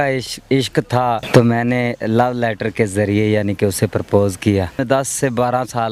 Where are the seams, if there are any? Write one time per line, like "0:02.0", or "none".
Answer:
0:01.2
0:04.8